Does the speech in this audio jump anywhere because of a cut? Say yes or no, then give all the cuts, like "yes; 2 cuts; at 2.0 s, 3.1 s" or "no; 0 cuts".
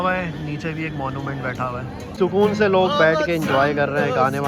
no; 0 cuts